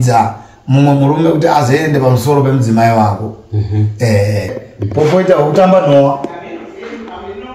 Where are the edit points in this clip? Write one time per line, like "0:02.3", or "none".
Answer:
0:04.6